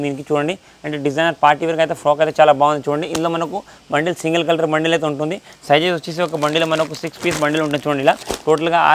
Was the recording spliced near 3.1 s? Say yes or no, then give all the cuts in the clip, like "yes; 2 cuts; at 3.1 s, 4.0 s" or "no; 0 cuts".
no; 0 cuts